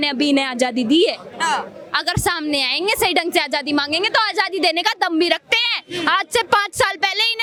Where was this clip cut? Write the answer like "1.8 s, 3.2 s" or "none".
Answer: none